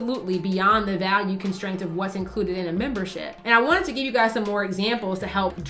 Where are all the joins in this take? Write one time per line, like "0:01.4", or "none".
none